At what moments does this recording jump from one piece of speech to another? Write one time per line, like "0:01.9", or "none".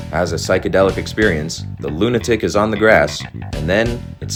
none